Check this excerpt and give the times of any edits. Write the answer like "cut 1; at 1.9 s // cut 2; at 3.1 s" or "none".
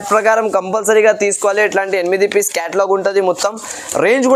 none